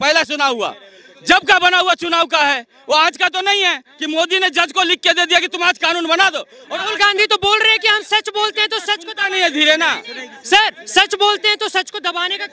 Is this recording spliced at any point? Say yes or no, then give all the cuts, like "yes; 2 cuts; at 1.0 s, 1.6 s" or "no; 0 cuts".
no; 0 cuts